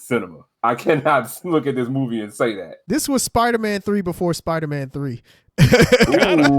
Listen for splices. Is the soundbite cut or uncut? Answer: cut